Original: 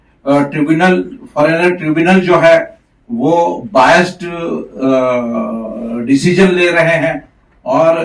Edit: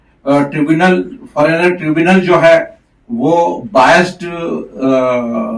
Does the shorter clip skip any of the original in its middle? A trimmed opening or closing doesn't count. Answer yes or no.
no